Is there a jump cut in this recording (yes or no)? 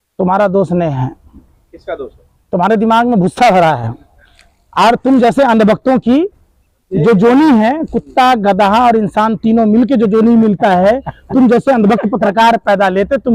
no